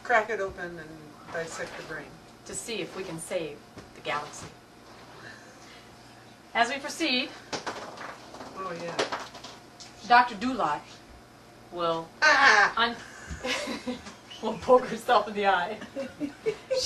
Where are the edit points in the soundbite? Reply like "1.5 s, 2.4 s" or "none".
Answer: 2.4 s